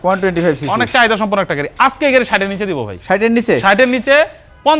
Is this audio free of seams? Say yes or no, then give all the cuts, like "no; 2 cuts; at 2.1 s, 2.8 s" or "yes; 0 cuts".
yes; 0 cuts